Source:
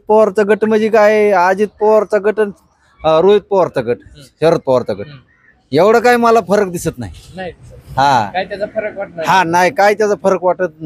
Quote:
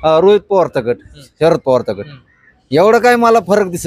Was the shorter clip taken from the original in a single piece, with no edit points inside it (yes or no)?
yes